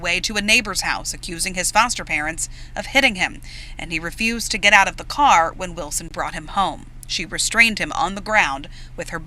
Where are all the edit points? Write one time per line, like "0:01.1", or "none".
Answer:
0:03.6